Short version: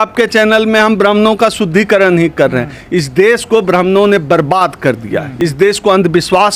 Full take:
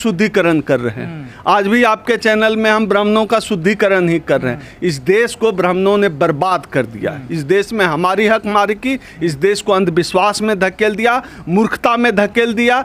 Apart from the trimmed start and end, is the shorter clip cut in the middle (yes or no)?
yes